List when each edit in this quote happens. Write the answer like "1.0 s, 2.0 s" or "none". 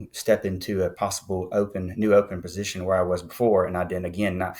0.9 s

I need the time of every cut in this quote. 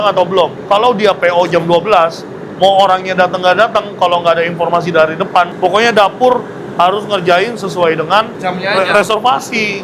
none

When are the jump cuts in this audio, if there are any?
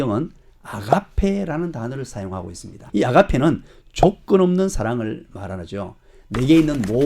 2.9 s

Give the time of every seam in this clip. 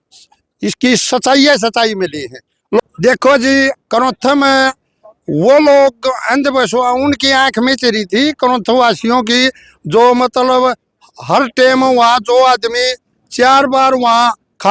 2.8 s

